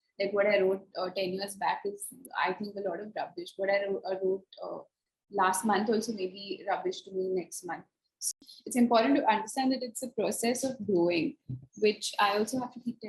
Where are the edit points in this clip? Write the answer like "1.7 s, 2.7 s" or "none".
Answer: 8.4 s